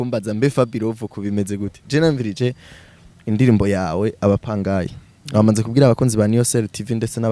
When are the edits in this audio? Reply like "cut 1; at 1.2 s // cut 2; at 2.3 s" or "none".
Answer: none